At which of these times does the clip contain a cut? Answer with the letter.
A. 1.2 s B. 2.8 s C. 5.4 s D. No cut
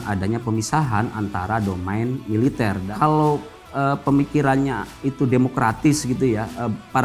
B